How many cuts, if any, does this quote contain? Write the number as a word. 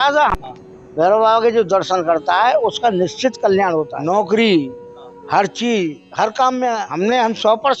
two